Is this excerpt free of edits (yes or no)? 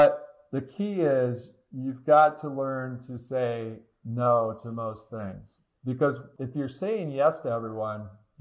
no